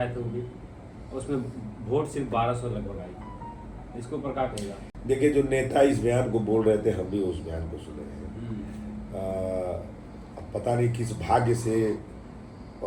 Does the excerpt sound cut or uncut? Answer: uncut